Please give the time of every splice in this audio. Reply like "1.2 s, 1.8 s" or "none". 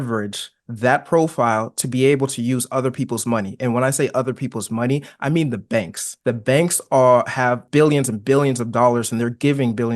6.0 s, 7.6 s